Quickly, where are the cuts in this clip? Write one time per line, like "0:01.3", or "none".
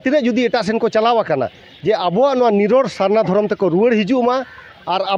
none